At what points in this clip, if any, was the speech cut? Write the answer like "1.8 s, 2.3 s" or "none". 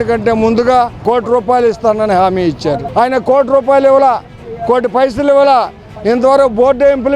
1.0 s, 2.8 s